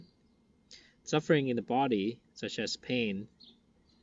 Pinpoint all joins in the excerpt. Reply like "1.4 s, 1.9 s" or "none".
2.5 s